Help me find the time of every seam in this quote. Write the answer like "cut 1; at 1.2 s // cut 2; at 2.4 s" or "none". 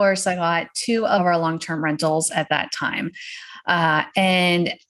cut 1; at 1.2 s